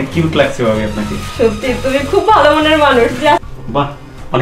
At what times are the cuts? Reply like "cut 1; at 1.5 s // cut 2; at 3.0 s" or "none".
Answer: cut 1; at 3.5 s

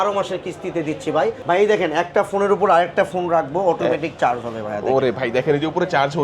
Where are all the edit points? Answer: cut 1; at 1.3 s

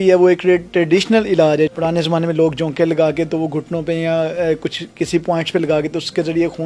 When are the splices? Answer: cut 1; at 1.7 s

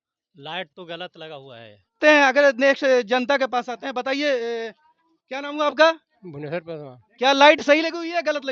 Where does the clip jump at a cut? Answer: cut 1; at 2.0 s

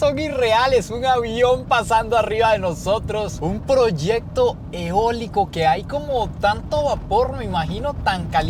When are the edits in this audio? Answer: none

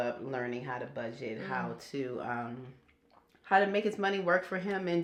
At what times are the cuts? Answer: none

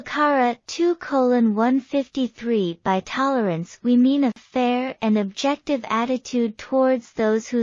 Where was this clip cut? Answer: cut 1; at 2.8 s

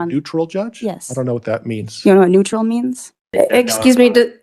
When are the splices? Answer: cut 1; at 3.2 s

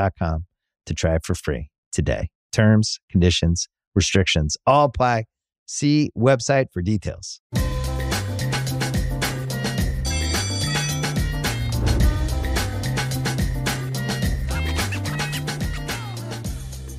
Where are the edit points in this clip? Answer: cut 1; at 7.3 s

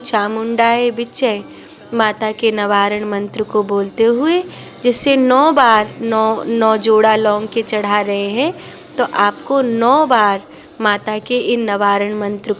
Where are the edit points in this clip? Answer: none

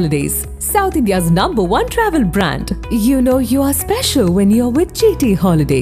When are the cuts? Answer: none

